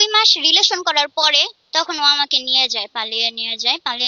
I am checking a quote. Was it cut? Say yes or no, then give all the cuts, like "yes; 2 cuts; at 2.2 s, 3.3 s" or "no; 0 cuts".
yes; 1 cut; at 1.6 s